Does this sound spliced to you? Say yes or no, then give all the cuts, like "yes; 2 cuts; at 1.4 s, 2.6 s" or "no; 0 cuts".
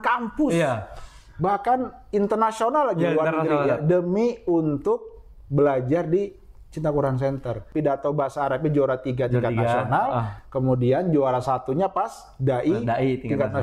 yes; 1 cut; at 7.6 s